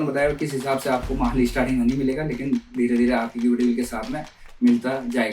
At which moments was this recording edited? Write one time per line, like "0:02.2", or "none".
none